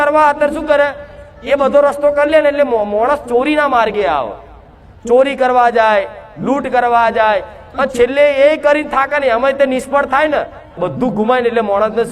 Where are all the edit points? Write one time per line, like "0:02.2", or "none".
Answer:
0:10.8